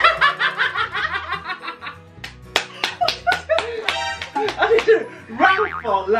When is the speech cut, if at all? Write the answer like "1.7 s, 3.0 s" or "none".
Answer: none

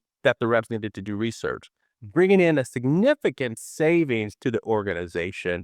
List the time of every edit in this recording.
none

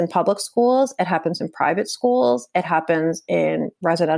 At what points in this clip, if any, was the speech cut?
none

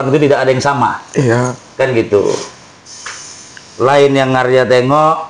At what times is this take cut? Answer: none

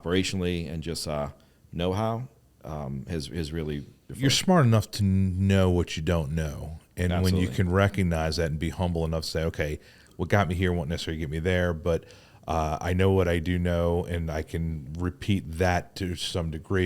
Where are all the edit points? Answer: 4.1 s

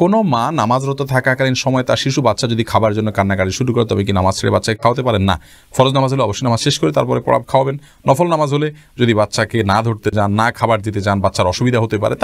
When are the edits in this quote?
none

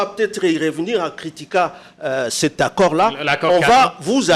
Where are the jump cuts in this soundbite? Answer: none

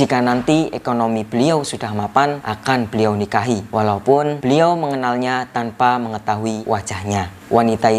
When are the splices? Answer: 2.5 s, 3.7 s, 4.4 s, 6.8 s

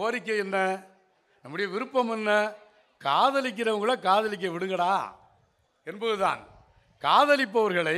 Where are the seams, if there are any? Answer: none

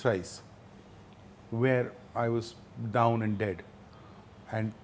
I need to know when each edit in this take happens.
none

